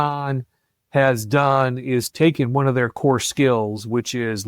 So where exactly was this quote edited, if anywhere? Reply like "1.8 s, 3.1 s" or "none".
2.1 s